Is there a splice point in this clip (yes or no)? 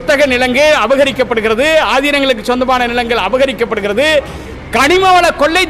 no